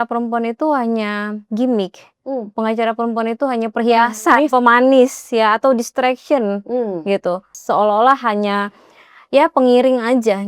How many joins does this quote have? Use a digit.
1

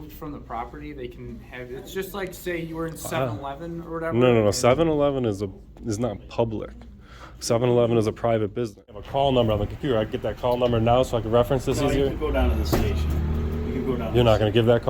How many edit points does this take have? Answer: 1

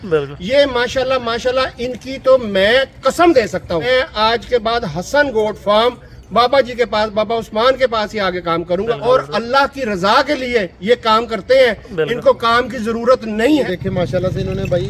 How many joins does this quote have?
3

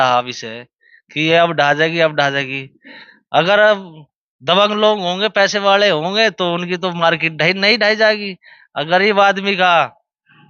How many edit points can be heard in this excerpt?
0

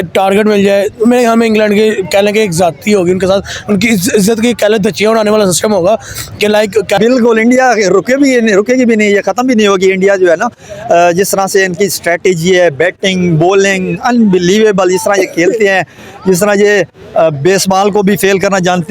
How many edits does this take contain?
1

